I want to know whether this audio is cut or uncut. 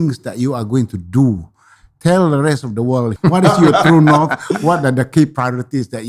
cut